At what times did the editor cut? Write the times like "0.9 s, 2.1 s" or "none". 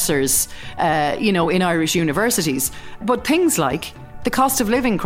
3.0 s, 4.1 s